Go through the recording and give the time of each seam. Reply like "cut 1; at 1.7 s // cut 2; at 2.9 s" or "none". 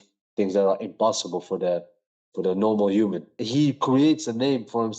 cut 1; at 3.3 s

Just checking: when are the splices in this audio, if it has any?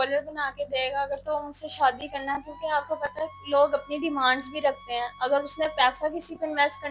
none

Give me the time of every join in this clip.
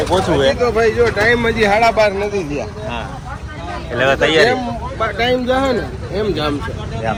none

